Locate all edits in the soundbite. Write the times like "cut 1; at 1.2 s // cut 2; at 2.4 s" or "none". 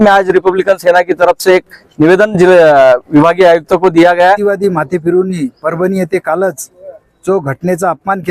cut 1; at 4.4 s